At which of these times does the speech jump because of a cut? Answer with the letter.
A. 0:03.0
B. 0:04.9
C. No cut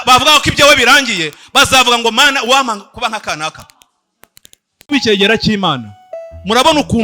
B